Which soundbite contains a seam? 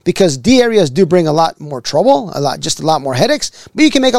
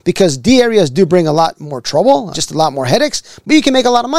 second; 1 cut; at 2.3 s

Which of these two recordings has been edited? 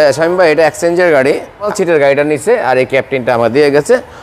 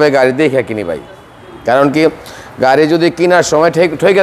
first; 1 cut; at 1.7 s

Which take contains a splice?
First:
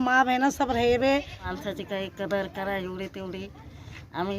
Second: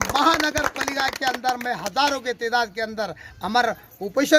first; 1 cut; at 1.5 s

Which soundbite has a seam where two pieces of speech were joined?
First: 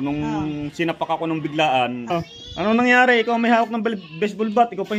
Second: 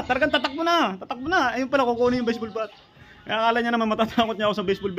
first; 1 cut; at 2.1 s

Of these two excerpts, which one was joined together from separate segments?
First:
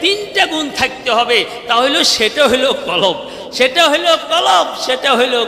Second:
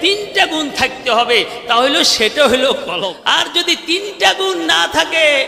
second; 1 cut; at 3.0 s

